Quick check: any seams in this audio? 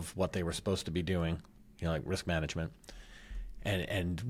no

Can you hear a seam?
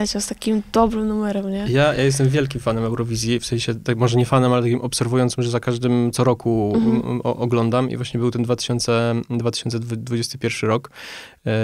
no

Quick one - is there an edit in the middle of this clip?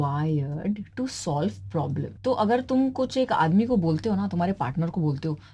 yes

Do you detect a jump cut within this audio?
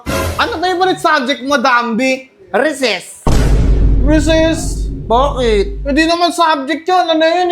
no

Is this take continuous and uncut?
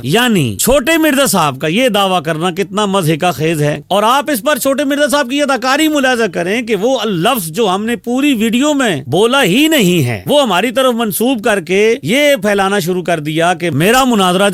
yes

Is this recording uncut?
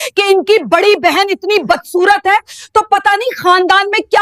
yes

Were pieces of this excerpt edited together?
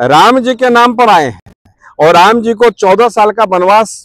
no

